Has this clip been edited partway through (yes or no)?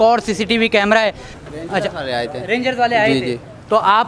yes